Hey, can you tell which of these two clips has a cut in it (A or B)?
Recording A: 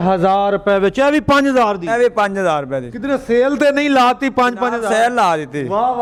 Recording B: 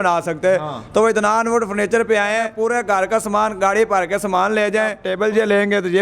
B